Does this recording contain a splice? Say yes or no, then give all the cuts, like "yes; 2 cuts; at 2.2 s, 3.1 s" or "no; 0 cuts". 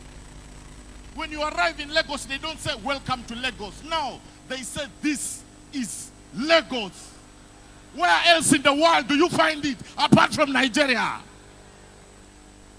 no; 0 cuts